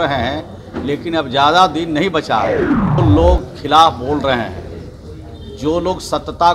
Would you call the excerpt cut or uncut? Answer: cut